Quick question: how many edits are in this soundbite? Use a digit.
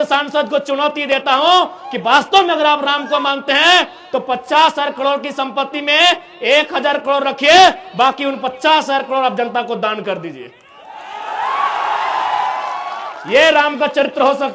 0